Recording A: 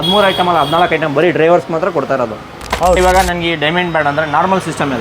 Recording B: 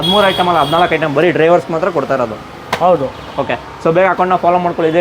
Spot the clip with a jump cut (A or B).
A